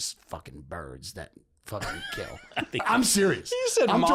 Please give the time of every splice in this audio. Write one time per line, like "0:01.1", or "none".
0:02.8

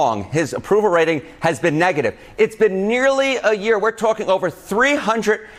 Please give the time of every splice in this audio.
none

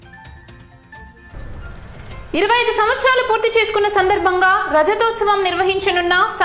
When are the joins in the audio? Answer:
0:01.2

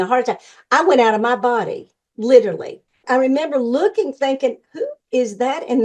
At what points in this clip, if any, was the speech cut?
0:03.0

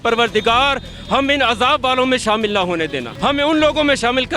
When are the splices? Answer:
0:03.1

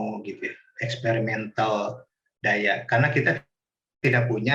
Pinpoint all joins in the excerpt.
none

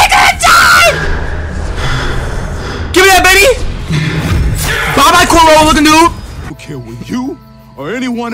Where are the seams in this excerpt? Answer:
0:06.5

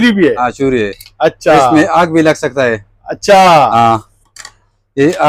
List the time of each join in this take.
none

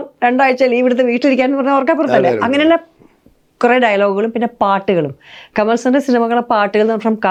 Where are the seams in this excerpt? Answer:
none

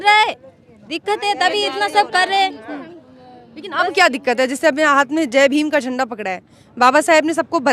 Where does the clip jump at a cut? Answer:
none

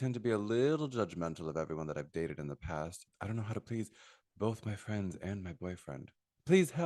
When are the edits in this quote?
0:03.0

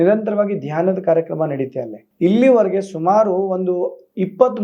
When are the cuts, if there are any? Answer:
0:02.0

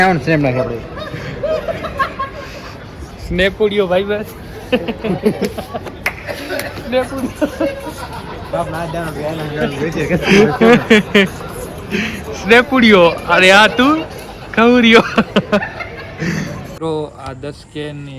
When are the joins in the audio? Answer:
0:16.7

